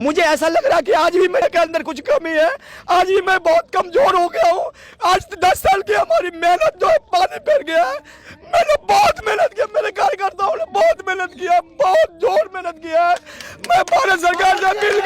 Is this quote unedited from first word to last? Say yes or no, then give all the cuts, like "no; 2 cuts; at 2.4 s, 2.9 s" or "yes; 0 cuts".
no; 1 cut; at 1.4 s